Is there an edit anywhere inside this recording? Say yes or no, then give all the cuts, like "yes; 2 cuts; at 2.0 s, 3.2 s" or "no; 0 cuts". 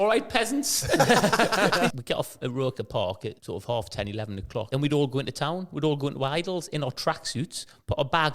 yes; 3 cuts; at 1.9 s, 3.4 s, 4.7 s